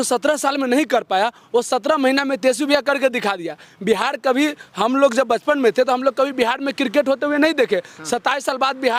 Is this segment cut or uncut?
uncut